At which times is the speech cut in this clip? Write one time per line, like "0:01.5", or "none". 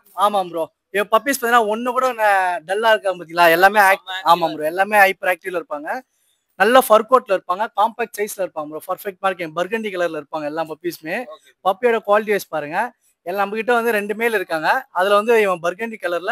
none